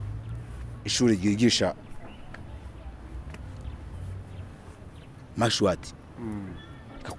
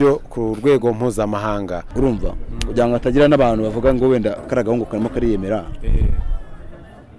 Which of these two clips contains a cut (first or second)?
second